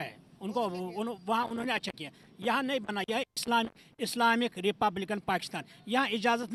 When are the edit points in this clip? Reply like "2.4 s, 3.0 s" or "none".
none